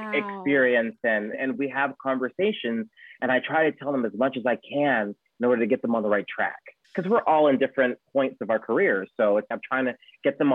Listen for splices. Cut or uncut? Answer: uncut